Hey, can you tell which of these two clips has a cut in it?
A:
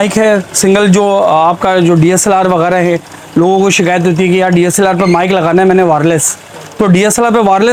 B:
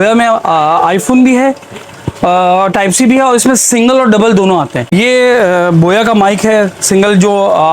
B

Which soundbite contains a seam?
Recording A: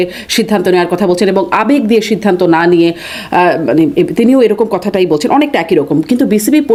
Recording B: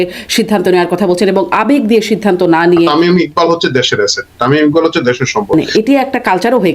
B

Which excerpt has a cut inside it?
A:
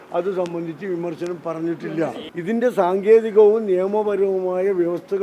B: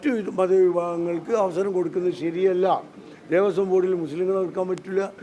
A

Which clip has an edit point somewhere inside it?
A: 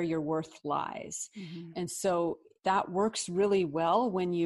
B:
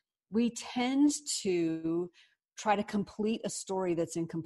A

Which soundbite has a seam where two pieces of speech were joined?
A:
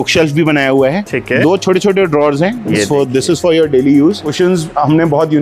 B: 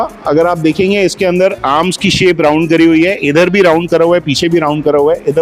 A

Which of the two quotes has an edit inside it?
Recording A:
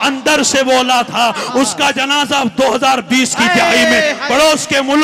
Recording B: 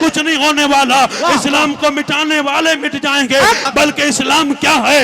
B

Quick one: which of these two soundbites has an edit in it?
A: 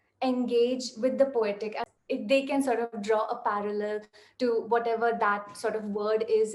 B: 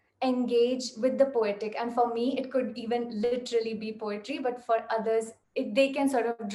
A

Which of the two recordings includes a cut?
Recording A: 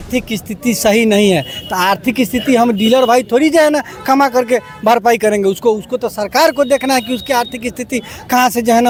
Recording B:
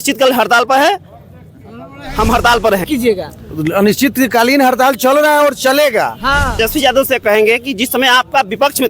B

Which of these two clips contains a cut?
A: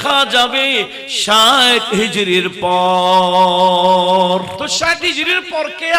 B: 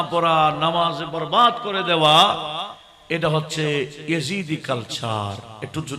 A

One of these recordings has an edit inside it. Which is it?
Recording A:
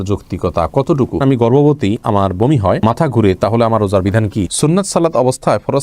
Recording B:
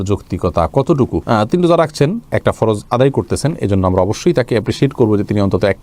A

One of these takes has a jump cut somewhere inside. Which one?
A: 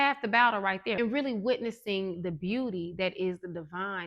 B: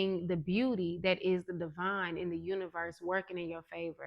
A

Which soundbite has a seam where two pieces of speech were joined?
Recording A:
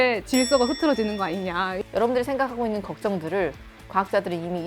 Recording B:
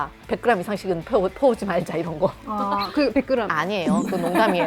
A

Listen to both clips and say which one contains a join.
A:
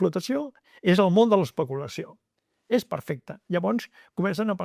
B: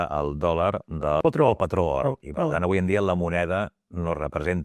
B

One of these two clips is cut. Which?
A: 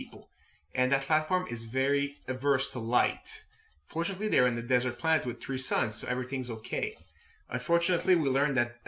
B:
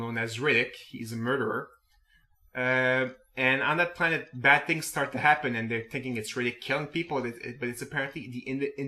A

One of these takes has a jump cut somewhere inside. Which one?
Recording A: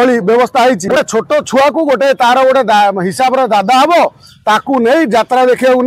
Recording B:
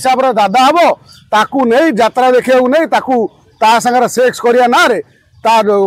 A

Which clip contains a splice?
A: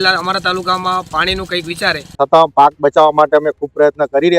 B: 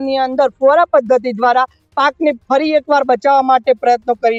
A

